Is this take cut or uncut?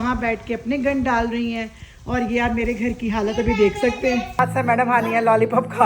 cut